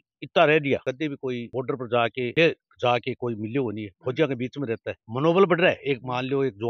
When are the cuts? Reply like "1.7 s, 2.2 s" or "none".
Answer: none